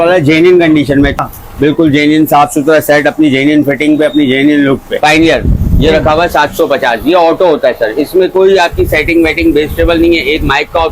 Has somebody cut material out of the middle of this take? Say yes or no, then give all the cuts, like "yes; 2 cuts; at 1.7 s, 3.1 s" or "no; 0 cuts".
yes; 2 cuts; at 1.2 s, 4.9 s